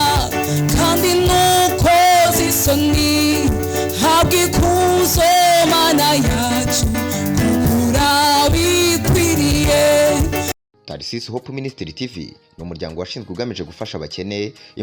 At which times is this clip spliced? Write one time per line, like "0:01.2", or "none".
0:10.5